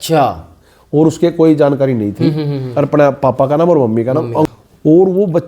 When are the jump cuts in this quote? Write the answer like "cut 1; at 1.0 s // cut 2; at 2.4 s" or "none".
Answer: cut 1; at 4.5 s